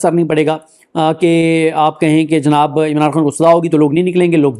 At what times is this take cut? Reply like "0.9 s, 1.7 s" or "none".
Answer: none

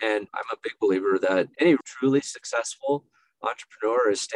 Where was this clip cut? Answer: 1.6 s

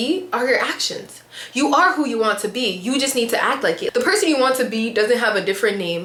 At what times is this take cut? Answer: none

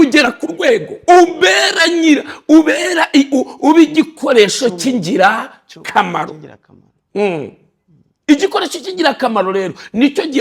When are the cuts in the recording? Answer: 0.9 s

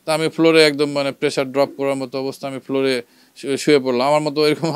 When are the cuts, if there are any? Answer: none

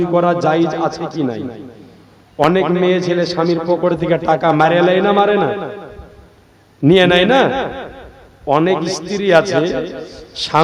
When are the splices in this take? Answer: none

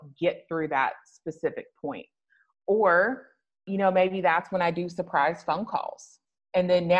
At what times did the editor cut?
3.6 s

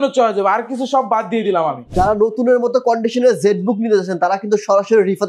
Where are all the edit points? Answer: 1.9 s

